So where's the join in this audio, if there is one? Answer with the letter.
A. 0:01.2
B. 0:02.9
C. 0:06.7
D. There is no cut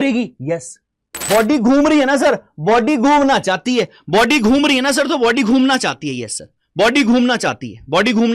A